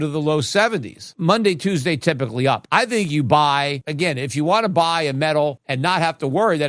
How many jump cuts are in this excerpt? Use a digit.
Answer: 4